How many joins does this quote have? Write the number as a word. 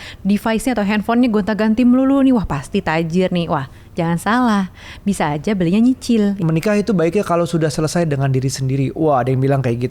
one